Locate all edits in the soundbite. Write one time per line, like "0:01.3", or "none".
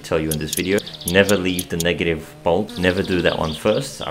0:00.8
0:02.7